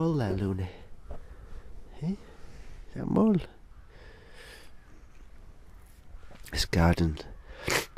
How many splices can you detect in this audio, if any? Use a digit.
0